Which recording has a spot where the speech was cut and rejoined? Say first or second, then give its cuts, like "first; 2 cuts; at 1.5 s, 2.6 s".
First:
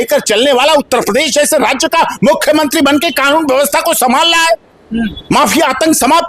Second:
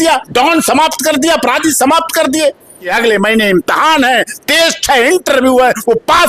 second; 1 cut; at 2.9 s